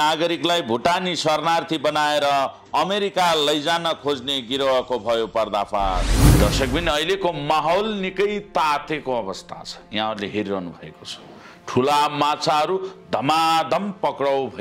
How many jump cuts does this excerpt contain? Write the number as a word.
one